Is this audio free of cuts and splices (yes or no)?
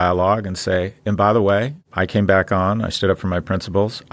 no